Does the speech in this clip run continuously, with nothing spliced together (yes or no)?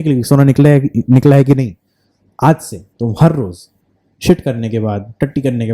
yes